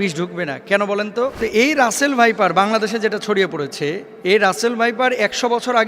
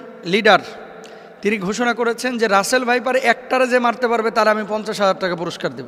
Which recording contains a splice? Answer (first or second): first